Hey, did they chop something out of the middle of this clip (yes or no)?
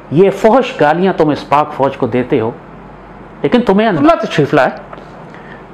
yes